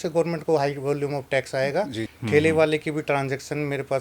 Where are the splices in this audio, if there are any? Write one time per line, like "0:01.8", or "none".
0:02.1

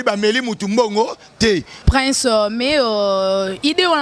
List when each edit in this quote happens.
0:01.8

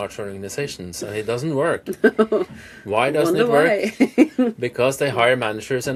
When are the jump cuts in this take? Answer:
none

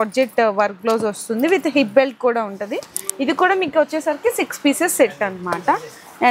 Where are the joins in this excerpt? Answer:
none

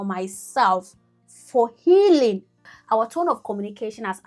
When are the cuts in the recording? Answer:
0:02.7

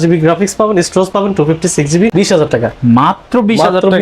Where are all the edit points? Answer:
0:02.1

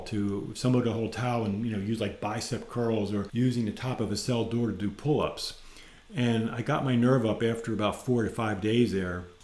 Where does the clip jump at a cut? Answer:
none

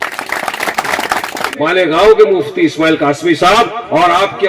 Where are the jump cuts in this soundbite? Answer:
0:01.4

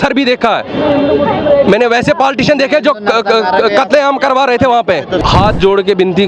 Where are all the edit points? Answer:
0:05.2

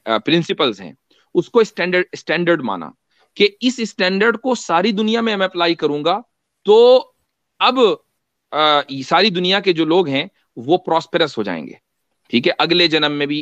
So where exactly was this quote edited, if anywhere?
none

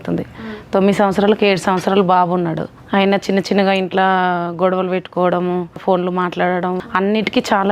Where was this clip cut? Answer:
0:02.7
0:05.8
0:06.8

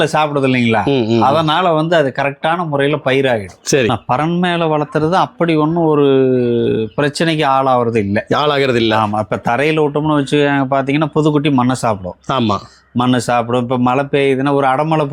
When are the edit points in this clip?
0:03.9

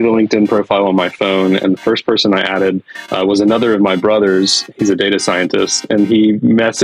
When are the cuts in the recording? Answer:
none

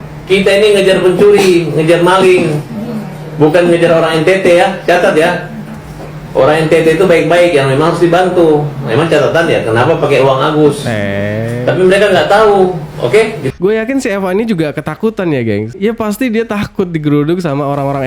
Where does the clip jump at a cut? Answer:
0:13.6

